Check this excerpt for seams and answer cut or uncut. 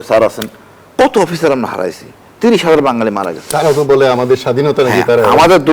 uncut